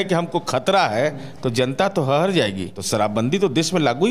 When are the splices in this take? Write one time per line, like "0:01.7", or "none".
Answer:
0:02.7